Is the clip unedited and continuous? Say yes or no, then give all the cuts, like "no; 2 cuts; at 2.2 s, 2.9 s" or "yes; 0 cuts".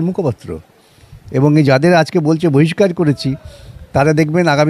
yes; 0 cuts